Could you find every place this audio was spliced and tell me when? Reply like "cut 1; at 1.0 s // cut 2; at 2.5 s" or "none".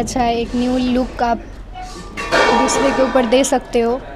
none